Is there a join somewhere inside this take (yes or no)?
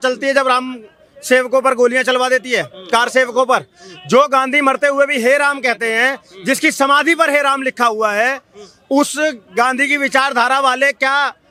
no